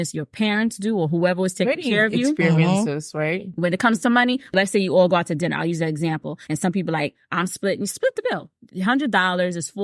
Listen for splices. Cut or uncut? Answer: cut